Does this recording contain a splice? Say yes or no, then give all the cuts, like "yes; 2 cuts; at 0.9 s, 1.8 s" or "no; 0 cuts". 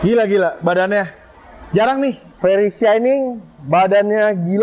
no; 0 cuts